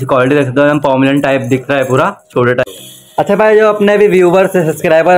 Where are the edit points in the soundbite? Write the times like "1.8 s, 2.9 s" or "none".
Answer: 2.7 s